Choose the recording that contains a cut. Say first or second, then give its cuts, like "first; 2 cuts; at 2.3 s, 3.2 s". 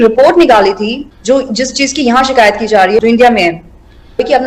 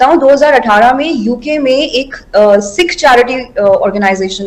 first; 1 cut; at 1.0 s